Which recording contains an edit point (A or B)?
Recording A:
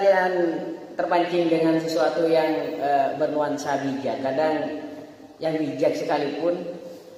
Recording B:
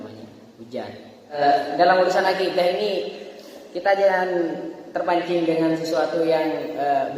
B